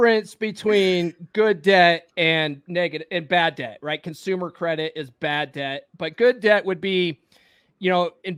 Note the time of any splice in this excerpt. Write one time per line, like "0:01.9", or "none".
none